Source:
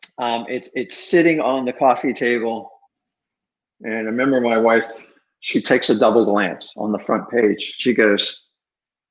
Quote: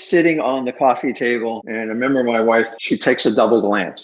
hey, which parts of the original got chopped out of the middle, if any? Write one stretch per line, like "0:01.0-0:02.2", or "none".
0:02.7-0:03.8
0:04.9-0:05.4